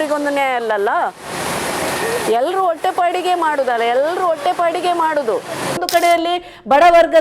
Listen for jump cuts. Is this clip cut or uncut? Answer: cut